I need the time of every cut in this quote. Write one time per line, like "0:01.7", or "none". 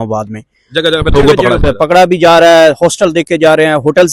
none